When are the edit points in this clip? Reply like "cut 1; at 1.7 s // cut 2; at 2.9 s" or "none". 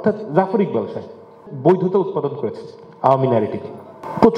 cut 1; at 1.4 s